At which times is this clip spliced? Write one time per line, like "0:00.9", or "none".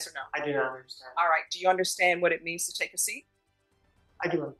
none